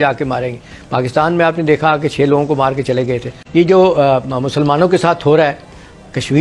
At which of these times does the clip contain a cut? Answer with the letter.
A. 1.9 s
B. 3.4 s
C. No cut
B